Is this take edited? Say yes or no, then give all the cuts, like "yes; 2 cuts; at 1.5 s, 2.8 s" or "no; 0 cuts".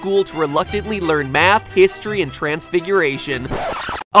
no; 0 cuts